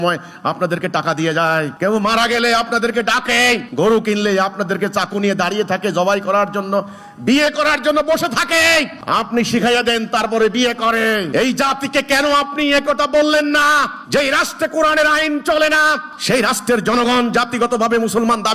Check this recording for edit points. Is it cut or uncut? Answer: cut